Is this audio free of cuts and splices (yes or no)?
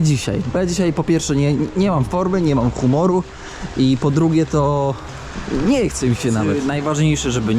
no